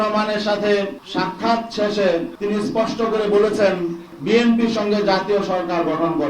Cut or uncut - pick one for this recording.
cut